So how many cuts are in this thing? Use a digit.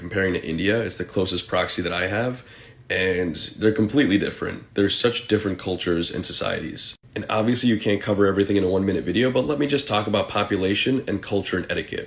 0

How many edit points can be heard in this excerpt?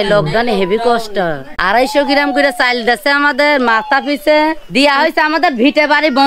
2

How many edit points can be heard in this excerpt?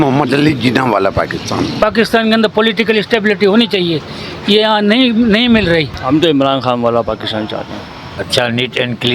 3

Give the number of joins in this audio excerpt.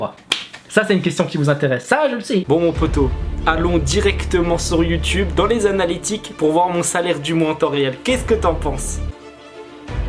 2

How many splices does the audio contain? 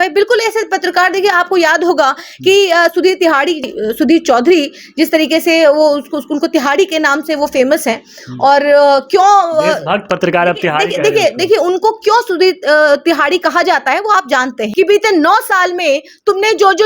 2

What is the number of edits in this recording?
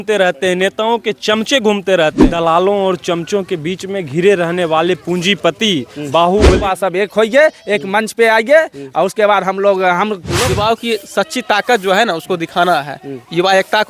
3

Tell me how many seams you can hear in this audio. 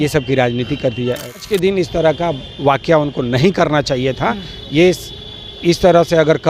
1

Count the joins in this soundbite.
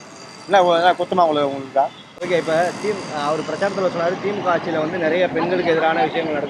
0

